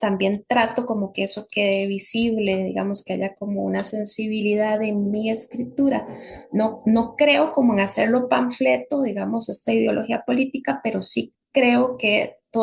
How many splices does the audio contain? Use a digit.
0